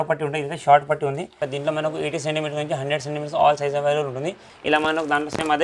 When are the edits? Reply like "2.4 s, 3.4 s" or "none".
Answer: 1.4 s, 4.5 s